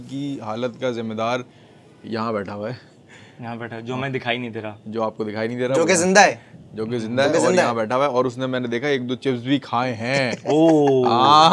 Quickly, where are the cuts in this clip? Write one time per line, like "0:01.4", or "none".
none